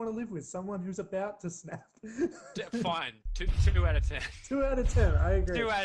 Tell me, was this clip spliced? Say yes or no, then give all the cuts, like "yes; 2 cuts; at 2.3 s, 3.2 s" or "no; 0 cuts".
no; 0 cuts